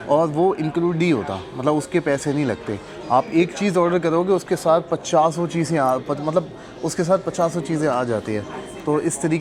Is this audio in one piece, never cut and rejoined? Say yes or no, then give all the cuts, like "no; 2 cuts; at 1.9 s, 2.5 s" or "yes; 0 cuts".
yes; 0 cuts